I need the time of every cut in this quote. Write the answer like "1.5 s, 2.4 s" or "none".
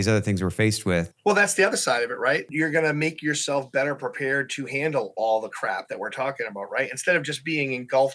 1.1 s, 2.5 s